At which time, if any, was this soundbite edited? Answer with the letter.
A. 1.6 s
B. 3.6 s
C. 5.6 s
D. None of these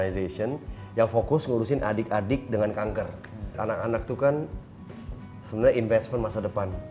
B